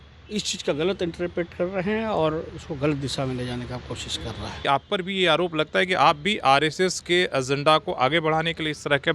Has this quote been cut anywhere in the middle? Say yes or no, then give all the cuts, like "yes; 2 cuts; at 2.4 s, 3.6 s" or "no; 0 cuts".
yes; 1 cut; at 4.6 s